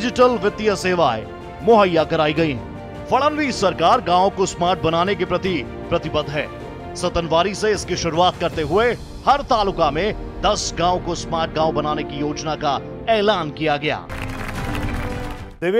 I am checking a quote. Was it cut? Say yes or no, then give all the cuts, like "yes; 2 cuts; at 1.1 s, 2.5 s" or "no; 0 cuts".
yes; 2 cuts; at 12.9 s, 14.2 s